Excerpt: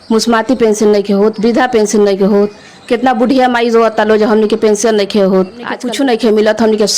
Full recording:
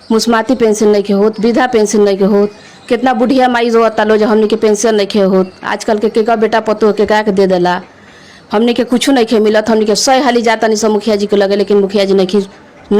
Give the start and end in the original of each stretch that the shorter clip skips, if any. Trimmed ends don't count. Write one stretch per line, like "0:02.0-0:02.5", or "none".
0:05.8-0:08.9